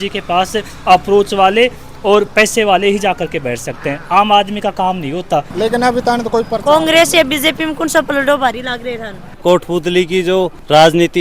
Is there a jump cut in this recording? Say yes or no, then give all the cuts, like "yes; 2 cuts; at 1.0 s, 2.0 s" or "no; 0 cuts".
yes; 2 cuts; at 5.5 s, 9.3 s